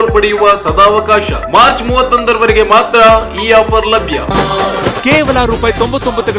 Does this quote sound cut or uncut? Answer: cut